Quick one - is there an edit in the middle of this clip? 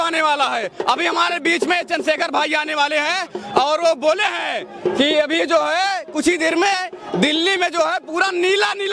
no; 0 cuts

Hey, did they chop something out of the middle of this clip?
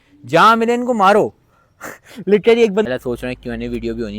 yes; 1 cut; at 2.9 s

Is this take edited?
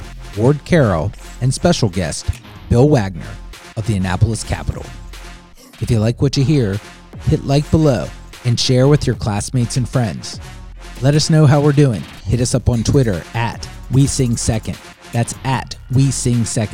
no; 0 cuts

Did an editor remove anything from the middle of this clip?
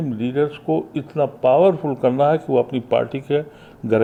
no; 0 cuts

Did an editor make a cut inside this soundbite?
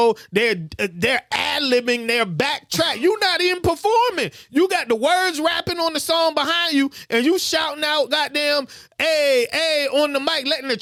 no; 0 cuts

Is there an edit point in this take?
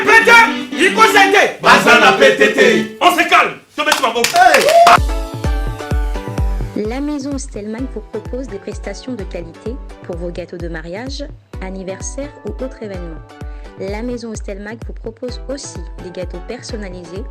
yes; 1 cut; at 5.0 s

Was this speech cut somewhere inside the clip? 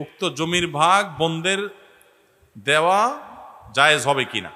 no; 0 cuts

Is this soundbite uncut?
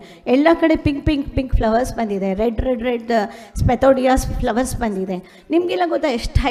yes; 0 cuts

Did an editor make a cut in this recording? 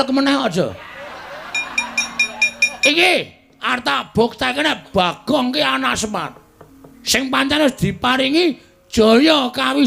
yes; 1 cut; at 2.9 s

